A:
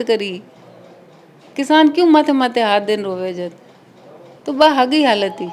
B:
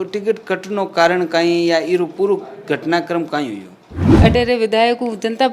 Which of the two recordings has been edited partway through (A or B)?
B